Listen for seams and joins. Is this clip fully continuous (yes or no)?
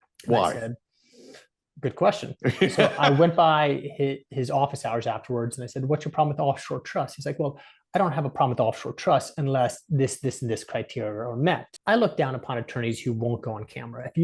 no